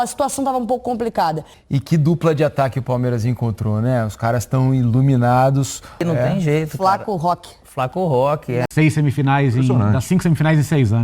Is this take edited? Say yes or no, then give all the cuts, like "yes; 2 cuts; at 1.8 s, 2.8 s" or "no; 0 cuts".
yes; 3 cuts; at 1.5 s, 6.0 s, 8.7 s